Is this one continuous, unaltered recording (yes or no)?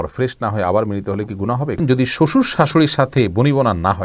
no